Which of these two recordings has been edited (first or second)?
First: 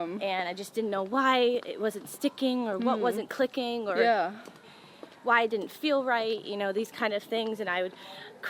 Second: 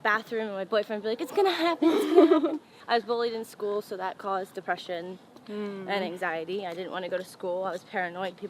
second